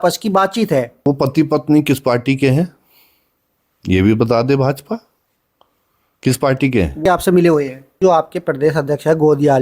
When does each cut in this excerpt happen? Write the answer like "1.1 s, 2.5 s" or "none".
1.1 s, 7.0 s, 8.0 s